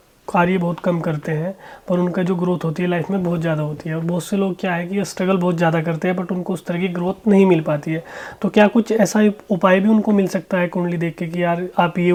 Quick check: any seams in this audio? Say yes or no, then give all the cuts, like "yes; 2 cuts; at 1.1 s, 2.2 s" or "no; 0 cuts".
no; 0 cuts